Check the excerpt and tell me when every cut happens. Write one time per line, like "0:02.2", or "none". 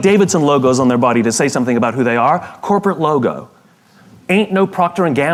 none